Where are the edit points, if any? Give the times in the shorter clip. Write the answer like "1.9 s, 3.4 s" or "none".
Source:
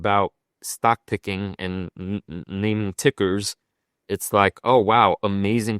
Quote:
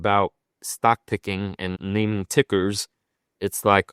1.8 s